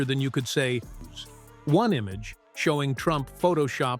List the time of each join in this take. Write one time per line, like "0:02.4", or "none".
0:01.0